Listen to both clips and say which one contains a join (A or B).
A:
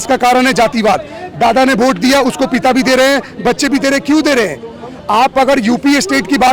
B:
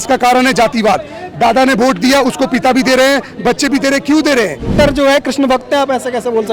B